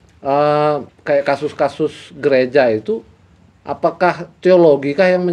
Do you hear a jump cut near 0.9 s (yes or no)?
yes